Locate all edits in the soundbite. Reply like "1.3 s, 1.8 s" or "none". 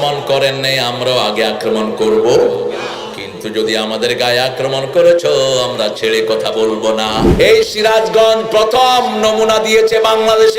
7.3 s